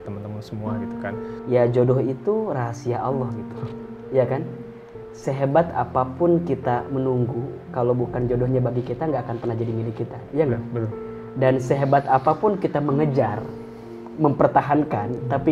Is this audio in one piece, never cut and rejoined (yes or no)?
no